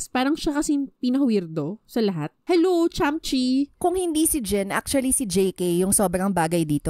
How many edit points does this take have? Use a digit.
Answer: 2